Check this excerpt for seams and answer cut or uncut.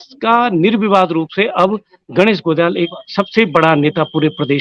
uncut